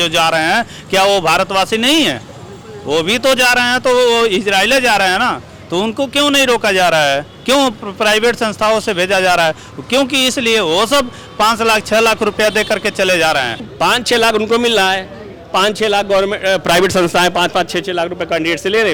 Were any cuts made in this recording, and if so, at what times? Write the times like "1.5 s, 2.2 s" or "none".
13.7 s